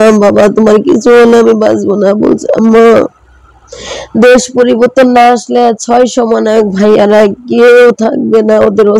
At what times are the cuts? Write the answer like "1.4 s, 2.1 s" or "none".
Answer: none